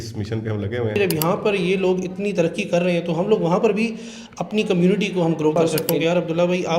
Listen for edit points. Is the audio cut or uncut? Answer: cut